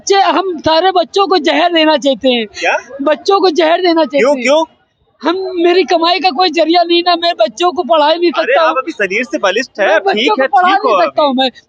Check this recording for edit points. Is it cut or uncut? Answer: uncut